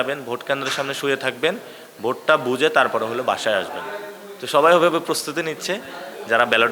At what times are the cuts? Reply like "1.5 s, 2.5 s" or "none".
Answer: none